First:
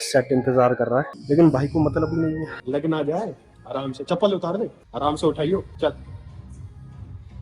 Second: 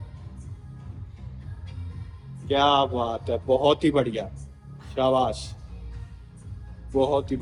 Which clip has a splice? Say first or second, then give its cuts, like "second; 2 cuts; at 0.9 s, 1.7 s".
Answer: first; 2 cuts; at 2.6 s, 4.8 s